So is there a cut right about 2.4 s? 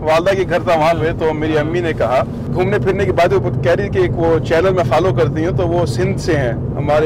yes; 1 cut; at 2.4 s

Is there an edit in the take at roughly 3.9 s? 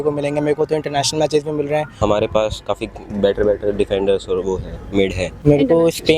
no; 2 cuts; at 2.0 s, 5.3 s

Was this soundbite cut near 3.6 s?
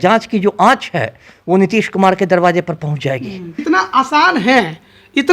yes; 1 cut; at 3.6 s

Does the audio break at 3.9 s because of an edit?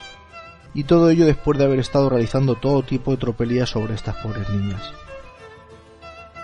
no; 0 cuts

